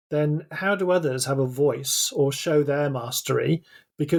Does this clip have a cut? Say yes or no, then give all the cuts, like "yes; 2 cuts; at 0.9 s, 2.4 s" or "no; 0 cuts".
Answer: no; 0 cuts